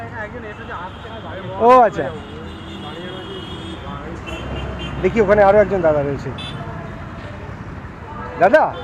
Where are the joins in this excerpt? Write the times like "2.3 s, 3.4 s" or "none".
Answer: none